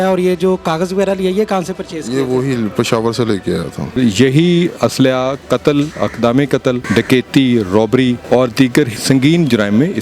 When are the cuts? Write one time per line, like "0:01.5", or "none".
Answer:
0:04.0
0:06.8
0:08.2
0:09.0